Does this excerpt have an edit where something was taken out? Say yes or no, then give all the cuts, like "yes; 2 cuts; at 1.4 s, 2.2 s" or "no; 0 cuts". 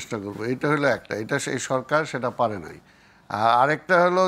no; 0 cuts